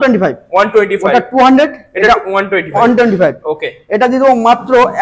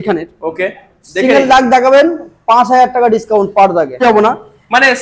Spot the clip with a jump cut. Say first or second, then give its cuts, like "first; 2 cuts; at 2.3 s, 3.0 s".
second; 1 cut; at 4.0 s